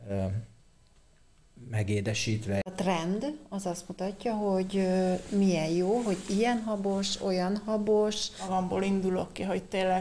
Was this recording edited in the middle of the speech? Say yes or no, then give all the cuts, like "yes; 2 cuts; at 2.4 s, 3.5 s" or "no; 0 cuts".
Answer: yes; 2 cuts; at 2.7 s, 8.4 s